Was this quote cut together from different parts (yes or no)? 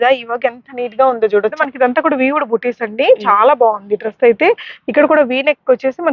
yes